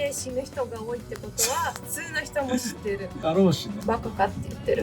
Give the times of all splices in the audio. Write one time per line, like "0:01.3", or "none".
0:03.7